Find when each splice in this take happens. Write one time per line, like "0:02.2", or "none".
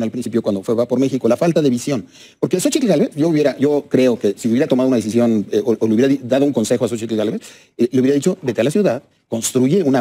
none